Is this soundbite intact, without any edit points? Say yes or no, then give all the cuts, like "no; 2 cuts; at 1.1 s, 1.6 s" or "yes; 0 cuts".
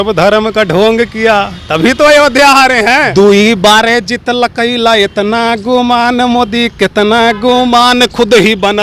no; 1 cut; at 3.1 s